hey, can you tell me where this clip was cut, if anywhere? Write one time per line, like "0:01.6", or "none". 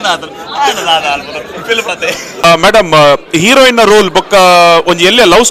0:02.4